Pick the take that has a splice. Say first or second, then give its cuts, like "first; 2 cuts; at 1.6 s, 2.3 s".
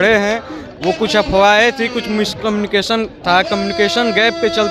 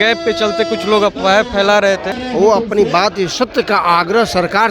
second; 1 cut; at 2.1 s